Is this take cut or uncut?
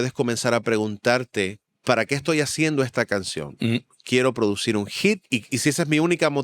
cut